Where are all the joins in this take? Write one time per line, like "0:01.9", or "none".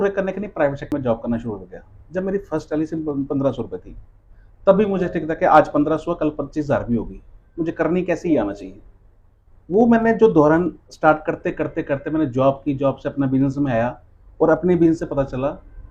0:00.9